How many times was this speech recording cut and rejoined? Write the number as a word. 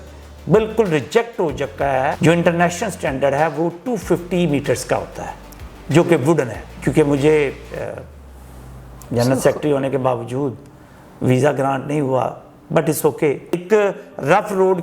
three